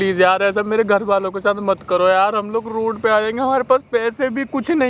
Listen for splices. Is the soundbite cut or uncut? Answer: uncut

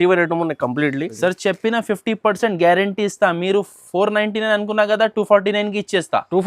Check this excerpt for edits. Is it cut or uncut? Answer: cut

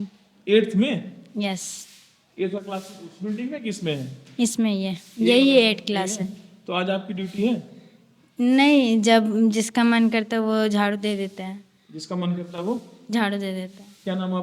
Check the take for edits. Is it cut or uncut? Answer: uncut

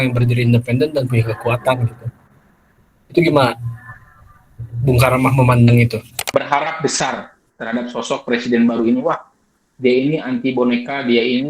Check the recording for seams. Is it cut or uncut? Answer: cut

